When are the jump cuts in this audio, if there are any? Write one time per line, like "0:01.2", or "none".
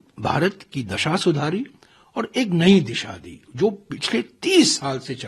none